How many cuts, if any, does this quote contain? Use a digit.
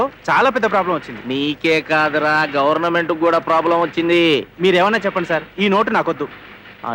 0